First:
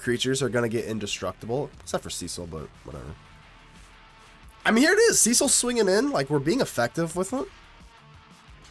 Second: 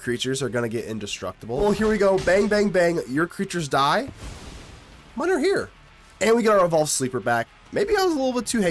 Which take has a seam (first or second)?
second